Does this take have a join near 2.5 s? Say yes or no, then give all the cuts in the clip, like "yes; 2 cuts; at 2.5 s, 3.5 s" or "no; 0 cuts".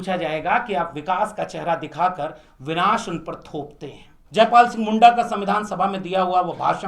no; 1 cut; at 4.1 s